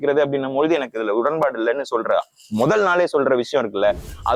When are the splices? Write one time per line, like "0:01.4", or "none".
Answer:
none